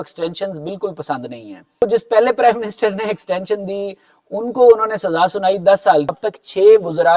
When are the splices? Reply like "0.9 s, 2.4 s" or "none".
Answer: 1.8 s, 6.2 s